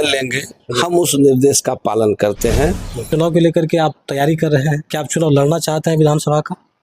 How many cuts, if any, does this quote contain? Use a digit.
1